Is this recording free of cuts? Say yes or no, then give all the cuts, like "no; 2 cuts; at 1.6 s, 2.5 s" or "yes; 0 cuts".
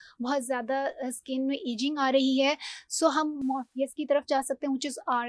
yes; 0 cuts